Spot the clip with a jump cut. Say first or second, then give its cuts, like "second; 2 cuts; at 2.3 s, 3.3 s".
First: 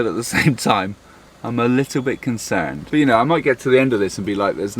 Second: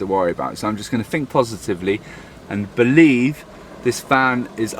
first; 1 cut; at 2.8 s